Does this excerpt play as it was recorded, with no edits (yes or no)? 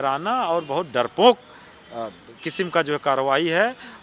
yes